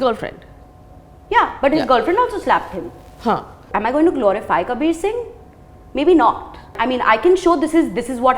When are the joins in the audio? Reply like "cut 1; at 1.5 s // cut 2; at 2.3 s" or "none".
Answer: cut 1; at 3.7 s // cut 2; at 6.7 s